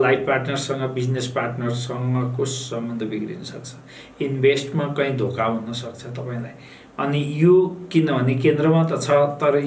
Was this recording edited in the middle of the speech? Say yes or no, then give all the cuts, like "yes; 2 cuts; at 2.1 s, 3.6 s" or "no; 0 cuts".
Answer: no; 0 cuts